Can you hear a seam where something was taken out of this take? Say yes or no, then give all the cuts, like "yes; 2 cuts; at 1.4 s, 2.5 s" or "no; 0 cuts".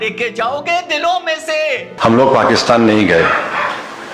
yes; 1 cut; at 1.9 s